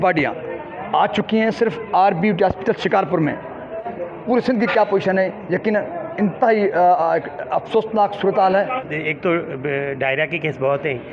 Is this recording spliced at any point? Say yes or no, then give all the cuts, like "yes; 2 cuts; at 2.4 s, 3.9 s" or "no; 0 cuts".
yes; 2 cuts; at 3.9 s, 8.7 s